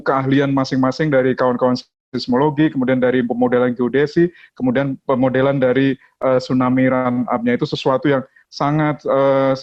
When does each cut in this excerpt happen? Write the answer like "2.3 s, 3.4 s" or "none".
none